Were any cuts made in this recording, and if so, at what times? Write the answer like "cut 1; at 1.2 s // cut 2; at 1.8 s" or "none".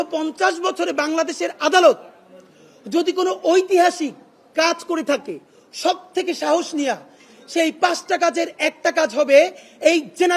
none